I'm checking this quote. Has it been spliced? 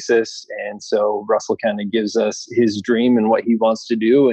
no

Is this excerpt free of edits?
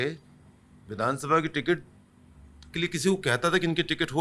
yes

